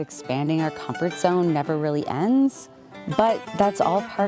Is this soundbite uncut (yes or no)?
yes